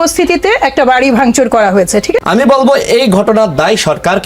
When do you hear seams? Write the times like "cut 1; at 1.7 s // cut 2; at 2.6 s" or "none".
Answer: cut 1; at 2.2 s

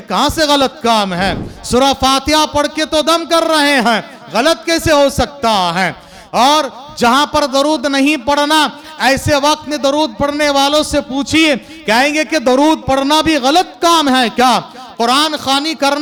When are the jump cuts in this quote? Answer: none

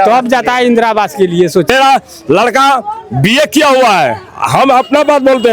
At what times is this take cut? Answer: cut 1; at 1.7 s

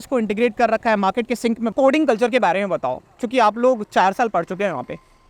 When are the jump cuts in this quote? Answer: cut 1; at 1.7 s

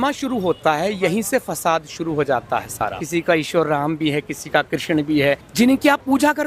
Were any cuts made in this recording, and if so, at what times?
cut 1; at 3.0 s // cut 2; at 5.4 s

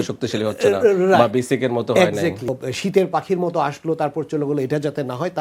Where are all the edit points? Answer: cut 1; at 2.6 s

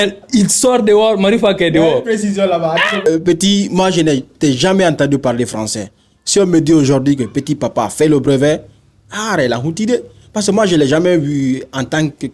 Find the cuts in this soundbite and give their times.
cut 1; at 3.1 s

